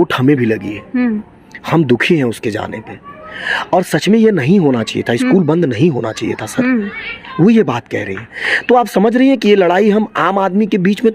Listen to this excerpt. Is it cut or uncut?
uncut